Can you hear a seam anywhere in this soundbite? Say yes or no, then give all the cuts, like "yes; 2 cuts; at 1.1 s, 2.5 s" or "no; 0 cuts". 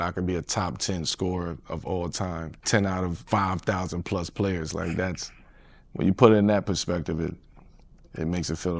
no; 0 cuts